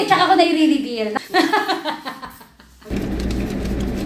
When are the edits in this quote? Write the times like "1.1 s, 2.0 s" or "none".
1.1 s, 2.8 s